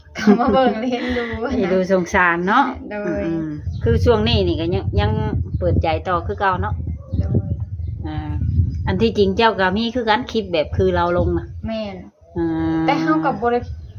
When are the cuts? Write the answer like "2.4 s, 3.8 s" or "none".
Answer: 3.6 s, 8.3 s